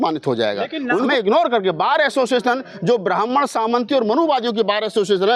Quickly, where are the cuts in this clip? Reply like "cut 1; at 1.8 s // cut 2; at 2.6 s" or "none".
cut 1; at 1.1 s

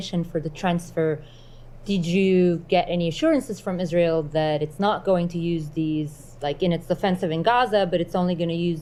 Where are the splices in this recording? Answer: none

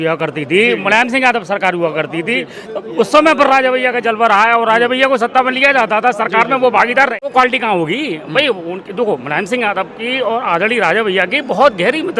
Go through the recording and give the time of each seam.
cut 1; at 7.3 s

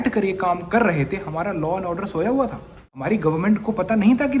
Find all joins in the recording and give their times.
cut 1; at 3.0 s

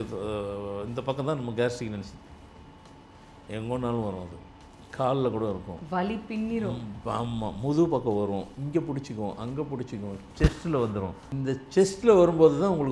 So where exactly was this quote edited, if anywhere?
cut 1; at 11.3 s

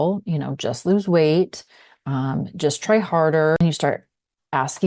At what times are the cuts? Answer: cut 1; at 3.6 s

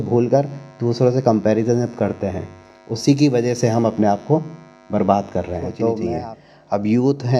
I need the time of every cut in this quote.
cut 1; at 6.1 s

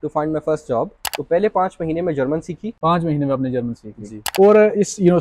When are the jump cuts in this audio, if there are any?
cut 1; at 1.0 s // cut 2; at 2.7 s // cut 3; at 4.3 s

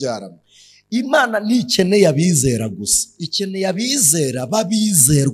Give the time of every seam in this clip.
none

